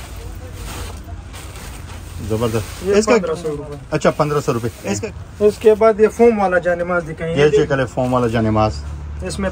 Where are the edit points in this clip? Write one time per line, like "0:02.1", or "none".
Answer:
0:05.0